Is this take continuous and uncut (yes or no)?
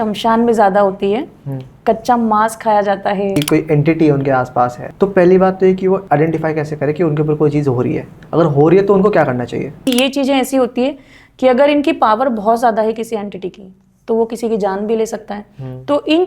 no